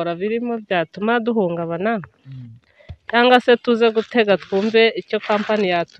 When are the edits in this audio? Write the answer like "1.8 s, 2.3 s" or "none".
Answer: none